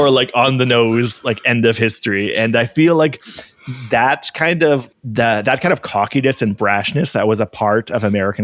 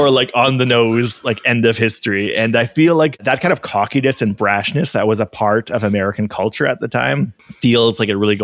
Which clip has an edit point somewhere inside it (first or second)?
second